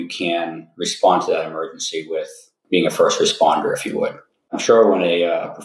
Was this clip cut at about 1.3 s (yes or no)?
no